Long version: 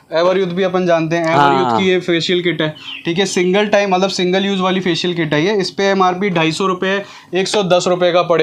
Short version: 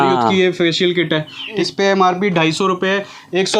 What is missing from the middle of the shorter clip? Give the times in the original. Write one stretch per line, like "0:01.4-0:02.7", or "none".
0:03.1-0:05.6